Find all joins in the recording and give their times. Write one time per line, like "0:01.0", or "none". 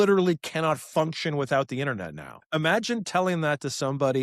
0:02.3